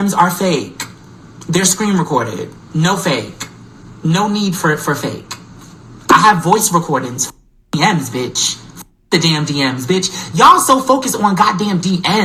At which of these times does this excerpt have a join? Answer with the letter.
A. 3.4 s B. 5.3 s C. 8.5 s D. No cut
D